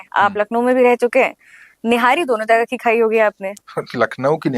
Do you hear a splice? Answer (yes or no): yes